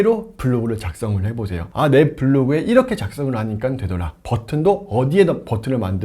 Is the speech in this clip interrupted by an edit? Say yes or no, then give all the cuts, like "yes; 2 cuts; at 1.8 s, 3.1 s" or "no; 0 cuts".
yes; 1 cut; at 1.6 s